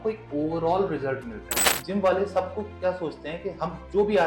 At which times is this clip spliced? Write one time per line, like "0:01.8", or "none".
0:01.8